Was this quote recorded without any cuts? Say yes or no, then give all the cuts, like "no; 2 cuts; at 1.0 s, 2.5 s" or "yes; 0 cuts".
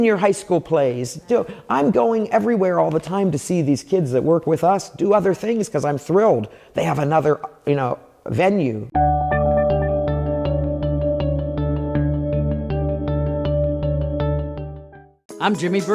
no; 1 cut; at 8.8 s